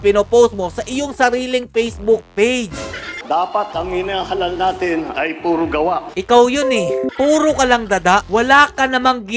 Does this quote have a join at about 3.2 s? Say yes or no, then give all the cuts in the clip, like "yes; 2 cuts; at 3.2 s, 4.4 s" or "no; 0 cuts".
yes; 3 cuts; at 3.2 s, 7.1 s, 8.3 s